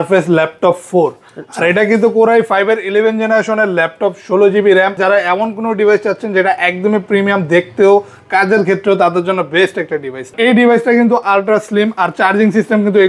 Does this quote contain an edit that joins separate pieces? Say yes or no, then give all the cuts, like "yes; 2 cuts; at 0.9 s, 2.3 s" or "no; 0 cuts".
yes; 2 cuts; at 5.0 s, 10.3 s